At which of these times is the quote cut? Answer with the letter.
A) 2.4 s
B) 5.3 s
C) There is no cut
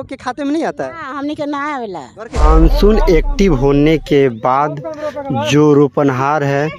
A